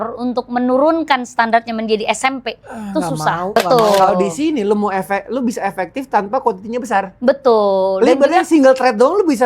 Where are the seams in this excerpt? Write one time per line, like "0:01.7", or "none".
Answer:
0:03.5

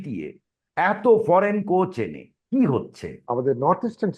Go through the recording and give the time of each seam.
0:03.1

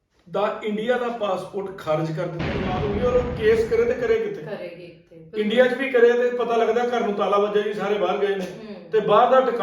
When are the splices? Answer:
0:02.8

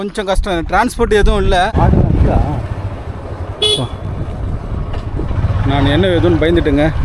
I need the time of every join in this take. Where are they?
0:01.7

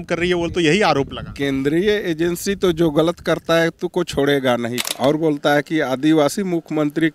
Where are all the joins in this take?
0:04.8

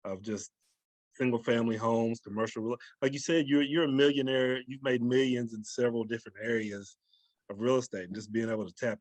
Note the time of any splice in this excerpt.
none

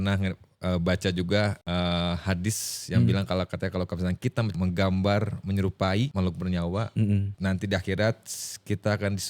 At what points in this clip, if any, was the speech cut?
0:01.6
0:04.5
0:06.1
0:07.3

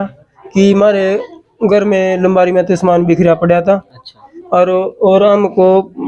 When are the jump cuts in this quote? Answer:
none

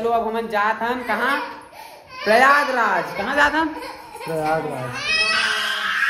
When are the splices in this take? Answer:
none

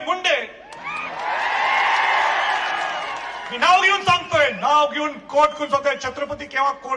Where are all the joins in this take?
none

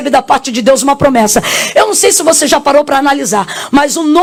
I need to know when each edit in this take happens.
none

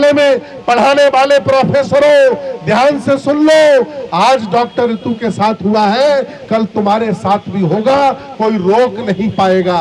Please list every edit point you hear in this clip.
none

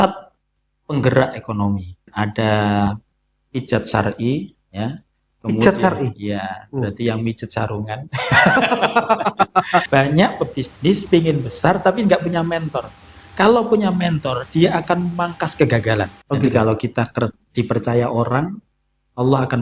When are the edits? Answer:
0:02.1
0:09.9
0:16.2

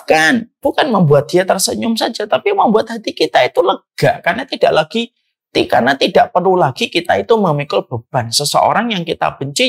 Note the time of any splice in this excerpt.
none

